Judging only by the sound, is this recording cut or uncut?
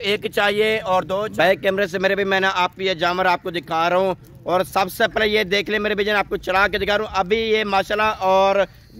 cut